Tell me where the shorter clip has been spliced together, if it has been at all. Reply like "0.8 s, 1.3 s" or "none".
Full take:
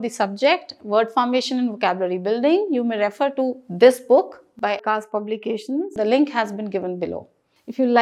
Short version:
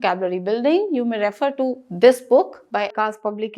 2.6 s